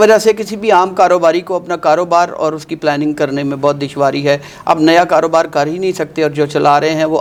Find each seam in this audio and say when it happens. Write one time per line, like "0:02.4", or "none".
none